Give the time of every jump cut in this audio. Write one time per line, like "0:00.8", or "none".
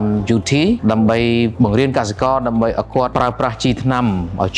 0:00.8
0:01.5
0:03.1